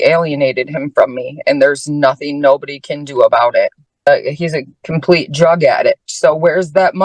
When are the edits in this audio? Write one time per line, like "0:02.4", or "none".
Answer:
0:04.1